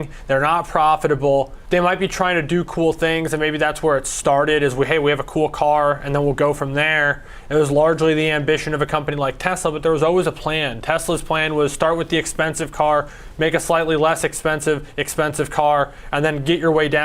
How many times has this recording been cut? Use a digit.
1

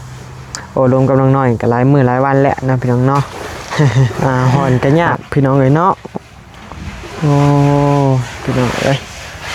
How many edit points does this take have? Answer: 1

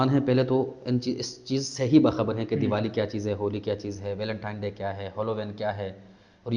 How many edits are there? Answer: 0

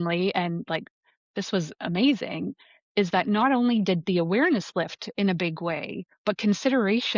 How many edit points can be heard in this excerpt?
0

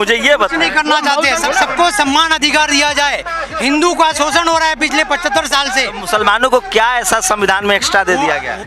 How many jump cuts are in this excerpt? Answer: 1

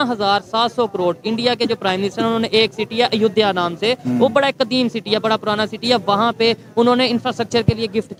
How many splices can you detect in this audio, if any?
0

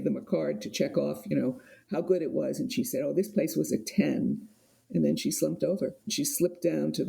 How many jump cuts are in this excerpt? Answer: 1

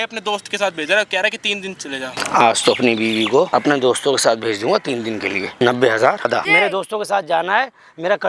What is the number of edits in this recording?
4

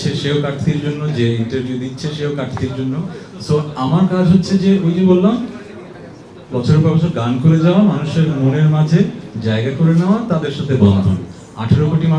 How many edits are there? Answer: 0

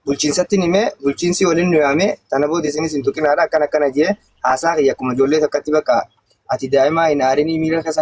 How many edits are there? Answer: 0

